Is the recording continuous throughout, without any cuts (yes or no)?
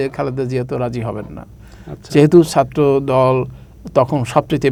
yes